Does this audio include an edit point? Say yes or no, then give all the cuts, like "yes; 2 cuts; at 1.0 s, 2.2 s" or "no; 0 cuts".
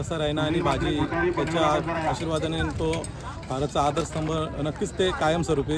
no; 0 cuts